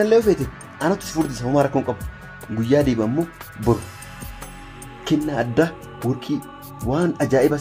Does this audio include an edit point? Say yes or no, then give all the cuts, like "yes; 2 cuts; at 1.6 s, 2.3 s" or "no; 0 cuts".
no; 0 cuts